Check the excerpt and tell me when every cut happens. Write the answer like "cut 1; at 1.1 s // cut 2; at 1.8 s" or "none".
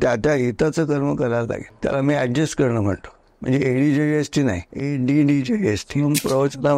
cut 1; at 1.7 s // cut 2; at 3.3 s // cut 3; at 4.7 s // cut 4; at 6.1 s